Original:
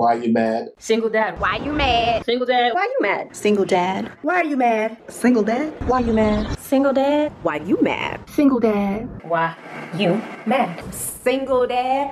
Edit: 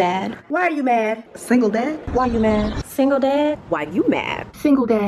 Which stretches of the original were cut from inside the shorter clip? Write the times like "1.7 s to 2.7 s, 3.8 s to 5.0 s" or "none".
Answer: none

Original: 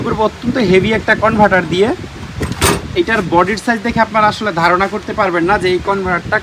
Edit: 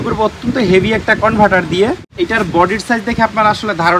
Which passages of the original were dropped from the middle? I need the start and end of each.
2.1 s to 2.9 s

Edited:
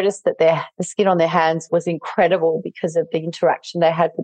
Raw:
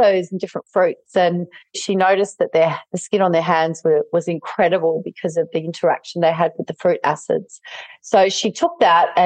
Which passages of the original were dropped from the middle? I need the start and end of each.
3.8 s to 4.1 s

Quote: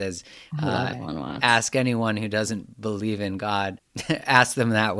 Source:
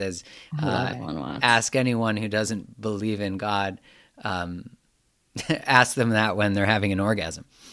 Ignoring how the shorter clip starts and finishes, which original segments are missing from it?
3.9 s to 5.3 s

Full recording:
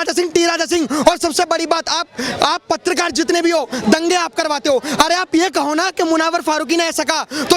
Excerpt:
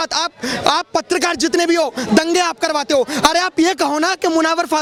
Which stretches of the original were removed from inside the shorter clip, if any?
none

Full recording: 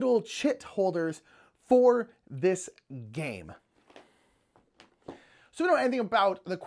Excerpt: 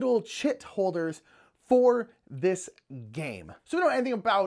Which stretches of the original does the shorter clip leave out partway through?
3.5 s to 5.4 s

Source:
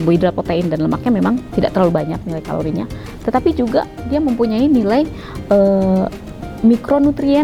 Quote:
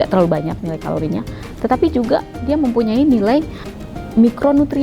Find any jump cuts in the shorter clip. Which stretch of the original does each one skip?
5.3 s to 6.2 s

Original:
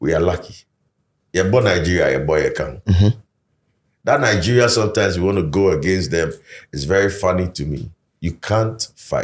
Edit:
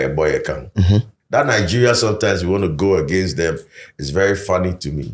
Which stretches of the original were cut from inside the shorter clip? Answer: 3.3 s to 3.9 s

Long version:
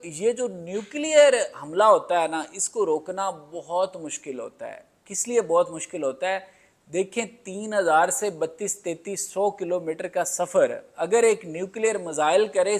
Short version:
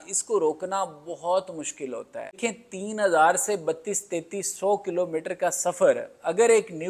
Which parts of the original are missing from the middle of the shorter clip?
4.8 s to 7.1 s

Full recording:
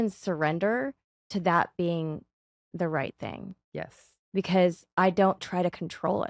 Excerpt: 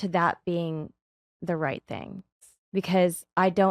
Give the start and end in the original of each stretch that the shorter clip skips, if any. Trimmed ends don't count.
3.7 s to 4.0 s

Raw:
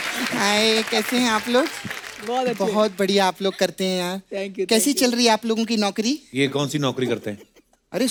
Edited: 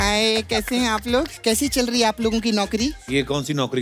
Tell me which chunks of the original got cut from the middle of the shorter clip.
1.8 s to 4.7 s

